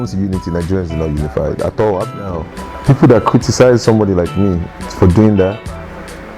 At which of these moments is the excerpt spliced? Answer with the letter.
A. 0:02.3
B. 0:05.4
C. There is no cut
A